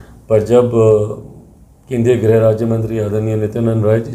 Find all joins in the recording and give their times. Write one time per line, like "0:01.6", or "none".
none

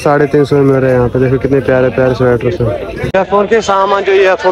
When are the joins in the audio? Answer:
0:02.9

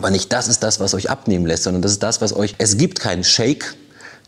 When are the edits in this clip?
0:02.5

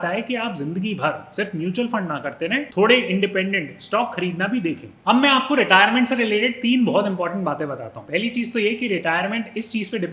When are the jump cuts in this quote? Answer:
0:04.9

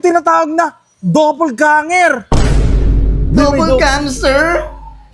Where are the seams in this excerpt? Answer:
none

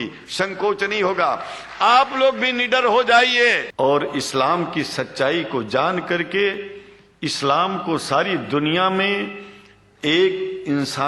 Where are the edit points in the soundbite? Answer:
0:03.7

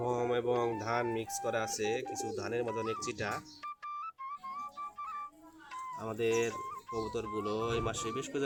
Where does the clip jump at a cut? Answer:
none

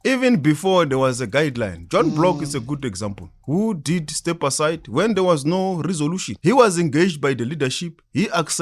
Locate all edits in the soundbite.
0:06.3

